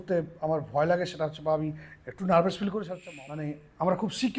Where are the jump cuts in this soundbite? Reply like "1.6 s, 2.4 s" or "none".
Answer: 3.0 s